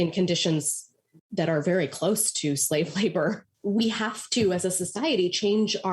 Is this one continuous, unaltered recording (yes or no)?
no